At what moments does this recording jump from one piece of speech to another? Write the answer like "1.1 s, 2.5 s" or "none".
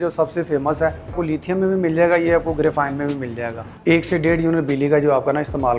1.2 s, 3.6 s